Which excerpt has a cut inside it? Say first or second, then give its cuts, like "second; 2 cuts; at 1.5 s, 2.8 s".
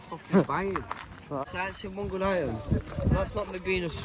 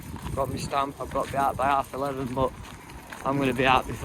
first; 1 cut; at 1.4 s